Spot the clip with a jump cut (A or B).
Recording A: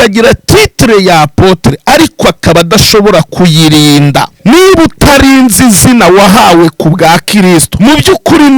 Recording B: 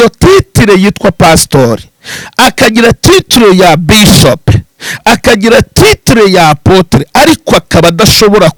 A